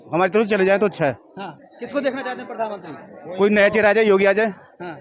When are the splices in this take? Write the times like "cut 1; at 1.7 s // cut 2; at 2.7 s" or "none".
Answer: none